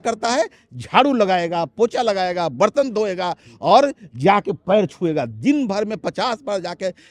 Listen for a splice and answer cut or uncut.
uncut